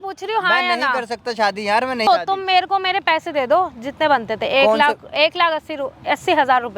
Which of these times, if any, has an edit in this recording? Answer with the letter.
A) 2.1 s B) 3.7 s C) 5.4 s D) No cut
A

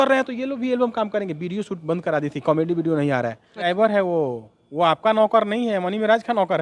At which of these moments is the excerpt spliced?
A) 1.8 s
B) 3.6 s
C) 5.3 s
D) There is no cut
B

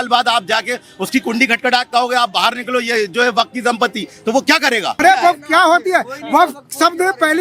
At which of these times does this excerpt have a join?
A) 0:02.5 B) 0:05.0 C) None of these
B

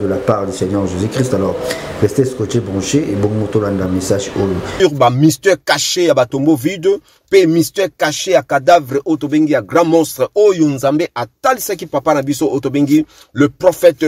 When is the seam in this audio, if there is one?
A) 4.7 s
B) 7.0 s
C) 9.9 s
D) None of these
A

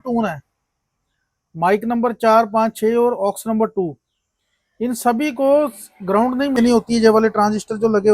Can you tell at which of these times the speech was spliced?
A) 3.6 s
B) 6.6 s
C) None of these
B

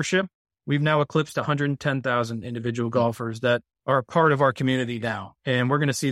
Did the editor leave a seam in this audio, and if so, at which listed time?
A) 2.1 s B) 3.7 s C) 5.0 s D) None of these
B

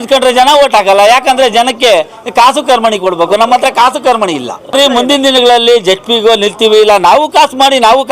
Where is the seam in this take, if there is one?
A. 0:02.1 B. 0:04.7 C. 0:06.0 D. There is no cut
B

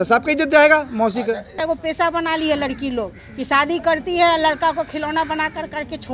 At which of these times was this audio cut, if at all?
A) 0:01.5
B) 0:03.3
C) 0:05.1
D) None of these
A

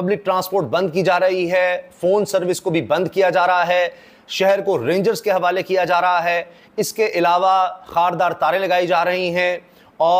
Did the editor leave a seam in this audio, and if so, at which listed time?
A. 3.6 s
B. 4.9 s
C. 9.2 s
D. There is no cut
D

